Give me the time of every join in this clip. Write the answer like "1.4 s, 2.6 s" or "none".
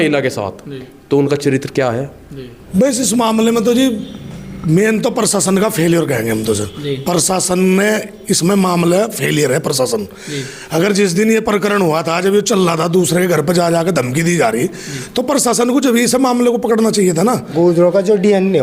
2.6 s, 17.5 s